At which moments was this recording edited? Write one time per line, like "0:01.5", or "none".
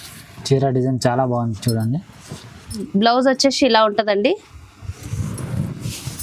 0:02.8